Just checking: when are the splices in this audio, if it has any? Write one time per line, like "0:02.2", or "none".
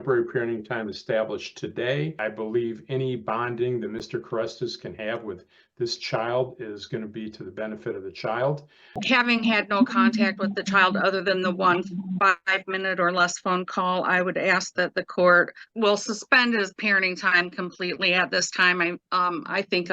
0:02.2
0:09.0
0:15.6